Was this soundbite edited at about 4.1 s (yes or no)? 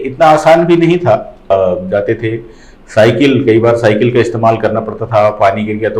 no